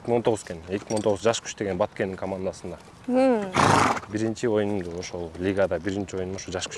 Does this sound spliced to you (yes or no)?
no